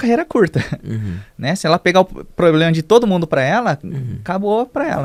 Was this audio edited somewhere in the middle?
no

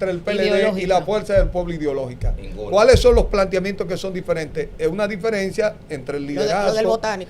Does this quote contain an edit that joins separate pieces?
no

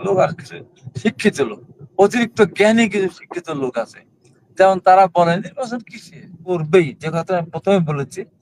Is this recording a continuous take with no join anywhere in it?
no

